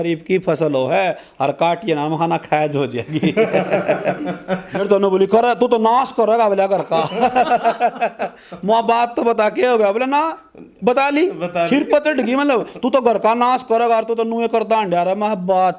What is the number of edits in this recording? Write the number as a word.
one